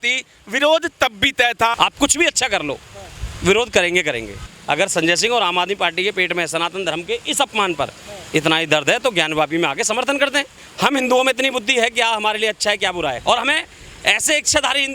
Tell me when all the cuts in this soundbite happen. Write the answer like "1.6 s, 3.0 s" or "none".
1.8 s, 4.5 s, 10.6 s, 13.2 s